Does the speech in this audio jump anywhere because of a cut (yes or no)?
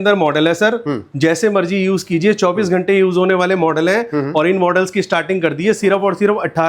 no